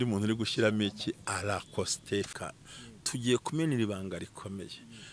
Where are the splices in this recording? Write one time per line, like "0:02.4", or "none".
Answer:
none